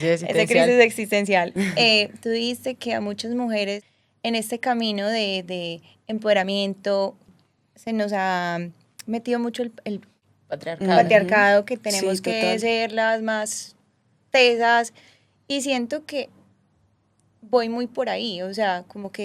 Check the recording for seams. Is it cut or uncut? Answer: cut